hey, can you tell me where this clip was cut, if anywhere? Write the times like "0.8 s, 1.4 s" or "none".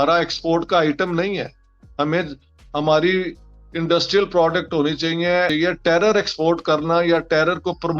5.5 s